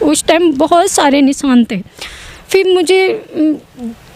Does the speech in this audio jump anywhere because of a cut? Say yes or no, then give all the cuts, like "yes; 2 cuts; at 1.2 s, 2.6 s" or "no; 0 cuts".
no; 0 cuts